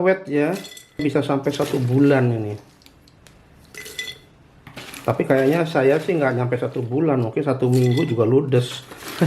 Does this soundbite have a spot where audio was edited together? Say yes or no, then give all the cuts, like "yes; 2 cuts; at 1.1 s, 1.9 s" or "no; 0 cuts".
yes; 1 cut; at 1.0 s